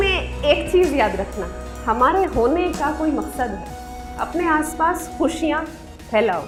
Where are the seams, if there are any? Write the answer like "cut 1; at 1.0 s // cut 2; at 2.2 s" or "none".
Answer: none